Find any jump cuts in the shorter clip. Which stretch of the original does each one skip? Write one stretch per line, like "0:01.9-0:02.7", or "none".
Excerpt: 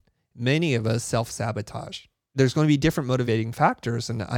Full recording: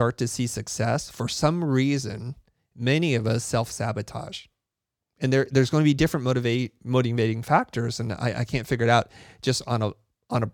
0:04.7-0:05.5
0:06.4-0:07.1